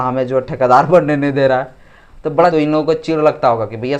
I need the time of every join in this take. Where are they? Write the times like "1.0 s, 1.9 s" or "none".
2.5 s

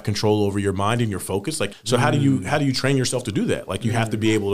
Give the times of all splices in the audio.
1.7 s

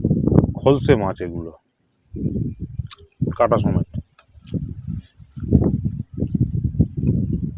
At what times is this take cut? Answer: 4.4 s

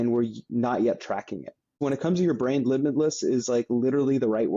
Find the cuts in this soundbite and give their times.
1.7 s

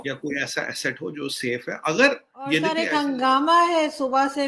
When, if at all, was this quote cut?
2.7 s

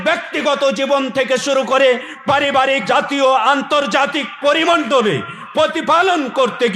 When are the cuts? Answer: 2.8 s

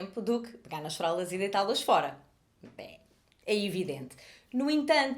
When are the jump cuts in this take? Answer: none

